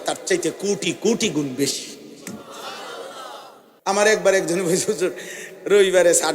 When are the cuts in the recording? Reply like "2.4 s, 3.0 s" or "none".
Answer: 3.6 s